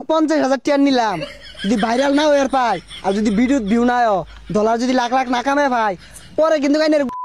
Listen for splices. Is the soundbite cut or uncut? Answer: uncut